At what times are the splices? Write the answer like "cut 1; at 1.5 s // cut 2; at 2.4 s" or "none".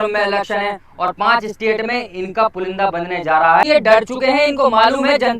cut 1; at 3.6 s